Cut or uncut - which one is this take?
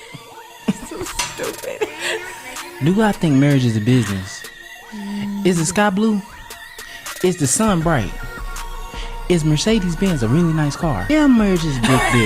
cut